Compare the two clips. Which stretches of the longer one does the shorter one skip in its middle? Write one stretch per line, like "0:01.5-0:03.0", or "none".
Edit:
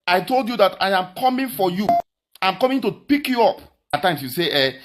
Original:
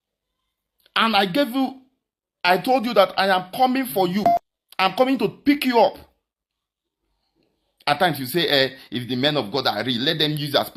0:06.3-0:07.9